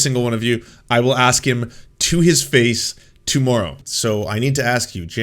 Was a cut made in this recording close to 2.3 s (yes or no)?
no